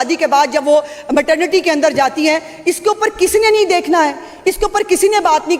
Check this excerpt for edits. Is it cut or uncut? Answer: uncut